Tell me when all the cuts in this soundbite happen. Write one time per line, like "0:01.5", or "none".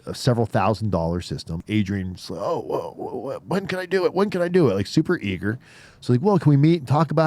0:01.6